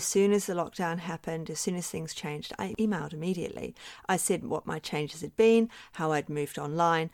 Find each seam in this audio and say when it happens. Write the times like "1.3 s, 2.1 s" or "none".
2.7 s